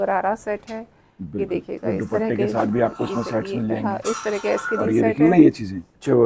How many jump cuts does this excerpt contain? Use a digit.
0